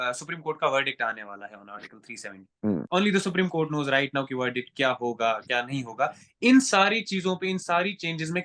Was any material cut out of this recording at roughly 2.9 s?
yes; 1 cut; at 2.9 s

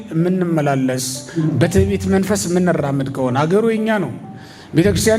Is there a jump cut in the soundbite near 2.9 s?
no; 0 cuts

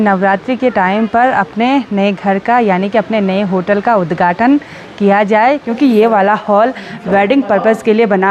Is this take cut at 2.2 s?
no; 1 cut; at 5.7 s

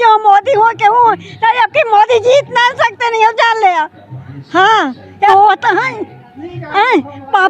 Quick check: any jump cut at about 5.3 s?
yes; 1 cut; at 5.3 s

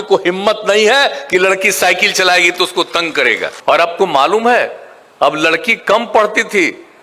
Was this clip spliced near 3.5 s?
yes; 1 cut; at 3.5 s

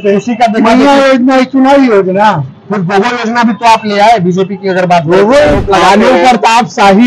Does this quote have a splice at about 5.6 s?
yes; 1 cut; at 5.6 s

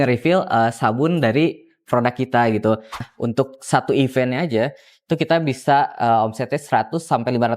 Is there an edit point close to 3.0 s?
yes; 1 cut; at 3.0 s

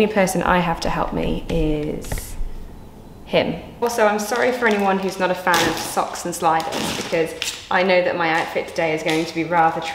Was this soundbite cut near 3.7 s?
yes; 1 cut; at 3.7 s

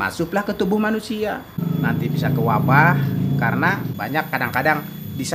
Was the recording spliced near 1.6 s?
yes; 2 cuts; at 1.6 s, 3.9 s

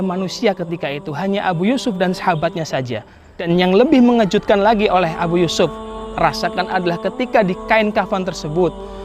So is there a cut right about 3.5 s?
yes; 1 cut; at 3.5 s

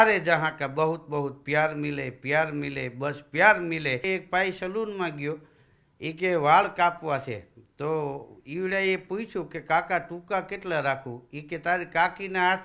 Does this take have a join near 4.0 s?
yes; 1 cut; at 4.0 s

